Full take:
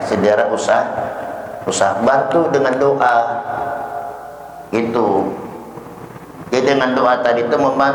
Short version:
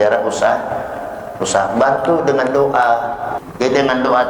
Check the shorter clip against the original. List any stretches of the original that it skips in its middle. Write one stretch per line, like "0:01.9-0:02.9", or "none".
0:03.6-0:06.3